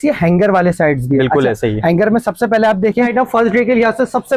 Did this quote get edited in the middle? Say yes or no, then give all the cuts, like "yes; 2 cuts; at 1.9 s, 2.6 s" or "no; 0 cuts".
yes; 1 cut; at 3.1 s